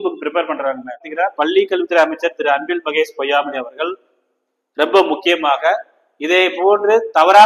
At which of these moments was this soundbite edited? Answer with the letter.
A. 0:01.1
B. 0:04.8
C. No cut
A